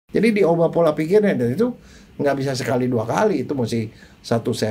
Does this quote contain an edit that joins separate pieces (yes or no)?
no